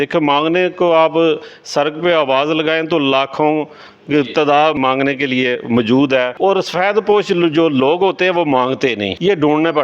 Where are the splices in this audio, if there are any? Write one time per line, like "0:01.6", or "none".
0:04.8
0:06.4